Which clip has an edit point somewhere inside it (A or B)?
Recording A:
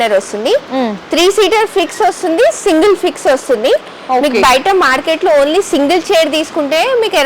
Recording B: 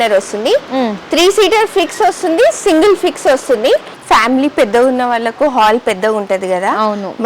B